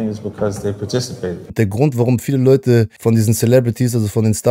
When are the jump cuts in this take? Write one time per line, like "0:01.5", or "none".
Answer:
0:01.5
0:02.9